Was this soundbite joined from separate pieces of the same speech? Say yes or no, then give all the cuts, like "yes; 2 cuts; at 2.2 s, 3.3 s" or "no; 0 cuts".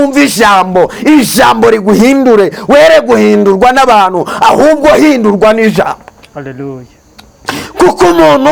no; 0 cuts